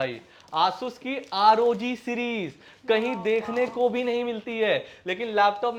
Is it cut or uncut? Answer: uncut